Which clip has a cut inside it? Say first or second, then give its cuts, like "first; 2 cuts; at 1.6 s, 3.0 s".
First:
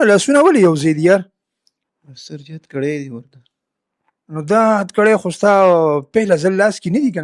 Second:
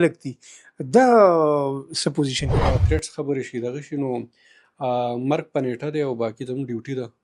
second; 1 cut; at 2.7 s